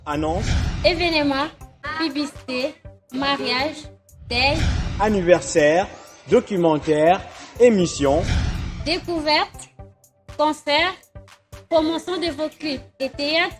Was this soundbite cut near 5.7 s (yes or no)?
no